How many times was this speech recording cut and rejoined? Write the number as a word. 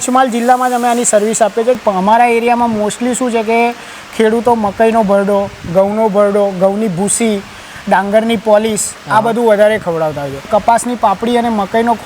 two